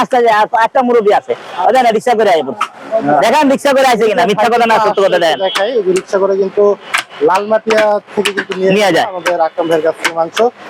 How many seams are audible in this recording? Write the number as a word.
zero